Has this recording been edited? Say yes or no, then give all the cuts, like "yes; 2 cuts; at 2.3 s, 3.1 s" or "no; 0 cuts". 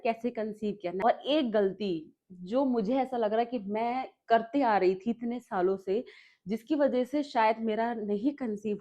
yes; 1 cut; at 1.0 s